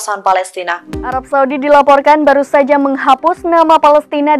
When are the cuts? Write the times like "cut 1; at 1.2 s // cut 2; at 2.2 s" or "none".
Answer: cut 1; at 0.9 s